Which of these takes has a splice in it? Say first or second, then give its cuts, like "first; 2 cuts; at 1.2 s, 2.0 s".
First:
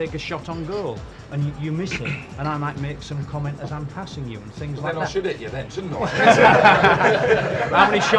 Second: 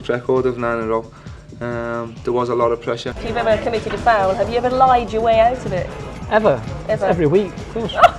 second; 1 cut; at 3.2 s